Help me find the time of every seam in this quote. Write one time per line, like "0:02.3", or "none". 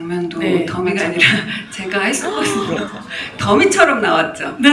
none